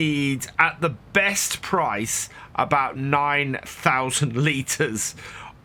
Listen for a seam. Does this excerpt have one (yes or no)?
no